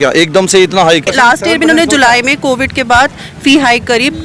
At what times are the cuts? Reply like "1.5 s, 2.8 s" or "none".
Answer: 1.1 s